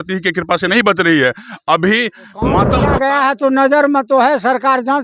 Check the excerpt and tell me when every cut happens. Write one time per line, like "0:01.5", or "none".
0:02.8